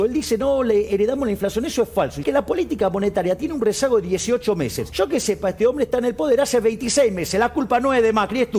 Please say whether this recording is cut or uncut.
cut